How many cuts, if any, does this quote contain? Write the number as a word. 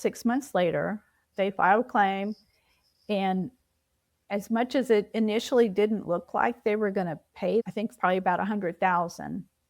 two